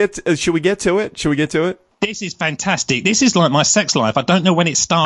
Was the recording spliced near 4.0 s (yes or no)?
no